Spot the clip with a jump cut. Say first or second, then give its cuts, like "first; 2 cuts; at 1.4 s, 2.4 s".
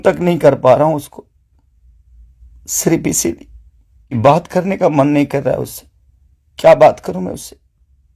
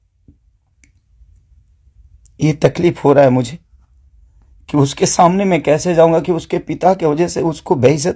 first; 1 cut; at 4.1 s